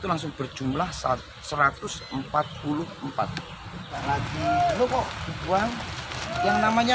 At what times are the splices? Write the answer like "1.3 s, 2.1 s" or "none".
4.0 s